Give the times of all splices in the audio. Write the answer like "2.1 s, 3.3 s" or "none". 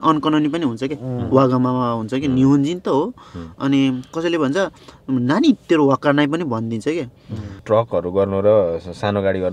7.6 s